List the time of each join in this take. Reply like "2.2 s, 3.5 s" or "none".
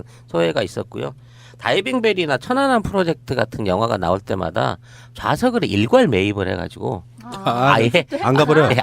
1.2 s